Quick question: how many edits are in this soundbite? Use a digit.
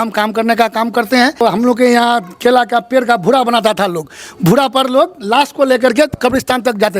1